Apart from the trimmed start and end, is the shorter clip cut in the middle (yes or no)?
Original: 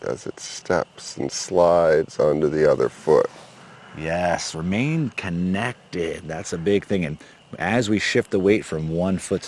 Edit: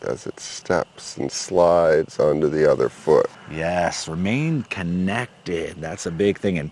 yes